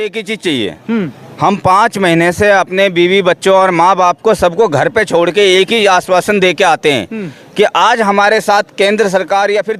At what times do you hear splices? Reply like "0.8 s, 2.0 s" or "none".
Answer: none